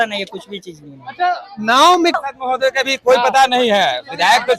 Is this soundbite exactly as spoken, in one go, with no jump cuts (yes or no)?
no